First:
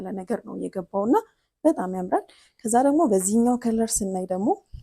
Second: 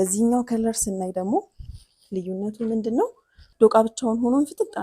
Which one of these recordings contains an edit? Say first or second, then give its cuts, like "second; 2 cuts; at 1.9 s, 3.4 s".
second; 1 cut; at 3.4 s